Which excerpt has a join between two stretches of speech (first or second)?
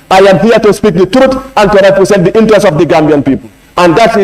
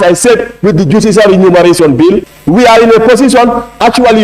second